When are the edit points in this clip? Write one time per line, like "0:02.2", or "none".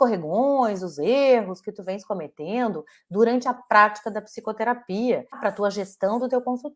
0:05.4